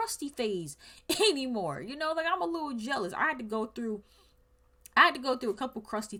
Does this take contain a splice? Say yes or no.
no